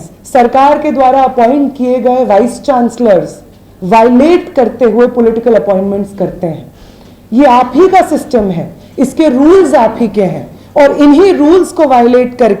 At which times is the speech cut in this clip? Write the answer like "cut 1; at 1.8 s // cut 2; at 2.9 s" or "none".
none